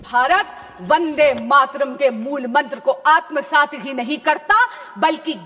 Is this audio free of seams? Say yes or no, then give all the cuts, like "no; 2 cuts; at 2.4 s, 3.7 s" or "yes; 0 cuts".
yes; 0 cuts